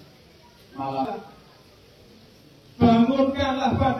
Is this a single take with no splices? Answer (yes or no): no